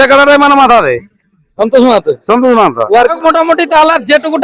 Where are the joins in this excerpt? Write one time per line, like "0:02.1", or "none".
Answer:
0:03.2

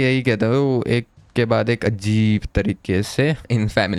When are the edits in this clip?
none

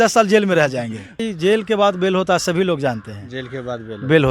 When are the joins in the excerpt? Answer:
0:01.2

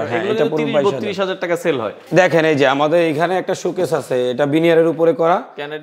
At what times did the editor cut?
0:02.0

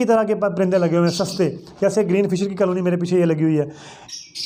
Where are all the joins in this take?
none

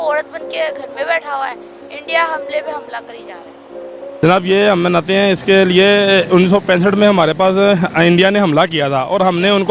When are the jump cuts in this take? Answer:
0:04.2

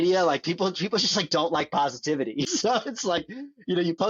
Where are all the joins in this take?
0:02.4

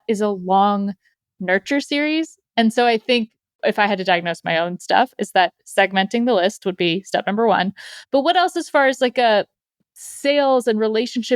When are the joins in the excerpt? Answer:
0:03.4

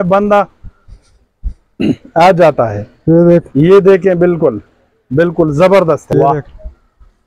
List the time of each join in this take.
0:06.0

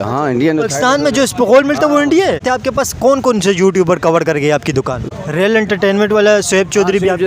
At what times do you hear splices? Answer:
0:02.4
0:05.1

